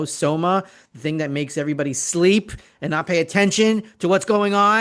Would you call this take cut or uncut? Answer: uncut